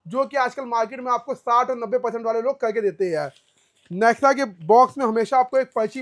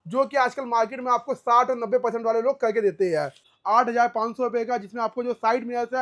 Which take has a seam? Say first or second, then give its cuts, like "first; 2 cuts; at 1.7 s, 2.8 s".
second; 1 cut; at 3.5 s